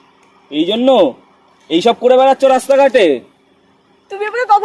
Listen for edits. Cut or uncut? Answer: uncut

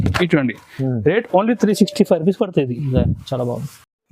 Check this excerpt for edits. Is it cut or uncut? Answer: uncut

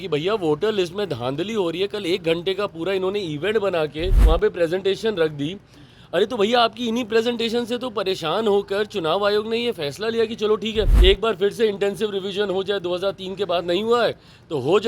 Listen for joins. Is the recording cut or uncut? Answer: cut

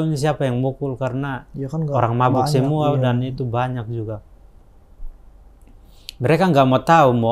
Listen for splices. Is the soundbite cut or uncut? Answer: uncut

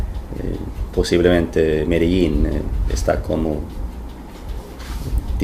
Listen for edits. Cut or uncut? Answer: cut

